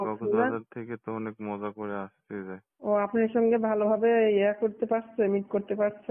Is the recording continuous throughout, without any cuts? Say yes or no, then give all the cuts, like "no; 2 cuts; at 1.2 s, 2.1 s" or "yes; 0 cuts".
no; 1 cut; at 2.7 s